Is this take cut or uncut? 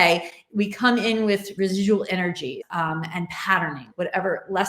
cut